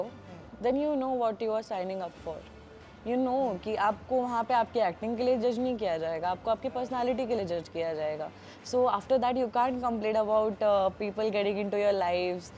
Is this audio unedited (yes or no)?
yes